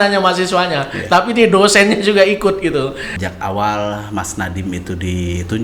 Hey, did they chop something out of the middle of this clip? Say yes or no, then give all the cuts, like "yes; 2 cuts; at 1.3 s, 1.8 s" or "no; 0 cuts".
yes; 1 cut; at 3.1 s